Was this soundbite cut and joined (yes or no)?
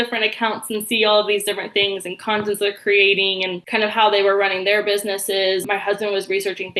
yes